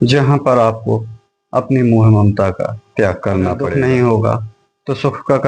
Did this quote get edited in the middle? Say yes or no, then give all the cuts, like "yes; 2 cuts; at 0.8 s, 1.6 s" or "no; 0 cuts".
yes; 1 cut; at 3.6 s